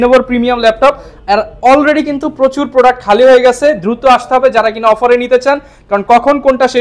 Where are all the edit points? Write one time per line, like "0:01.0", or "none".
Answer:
none